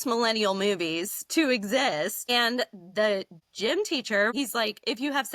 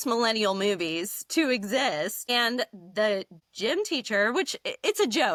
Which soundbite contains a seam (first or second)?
first